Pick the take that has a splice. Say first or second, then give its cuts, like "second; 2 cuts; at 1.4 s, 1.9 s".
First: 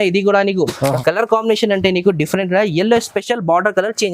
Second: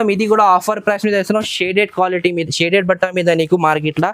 first; 1 cut; at 1.0 s